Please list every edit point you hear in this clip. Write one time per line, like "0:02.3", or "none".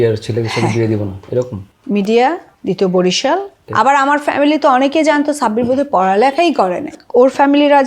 0:02.5
0:03.6
0:07.0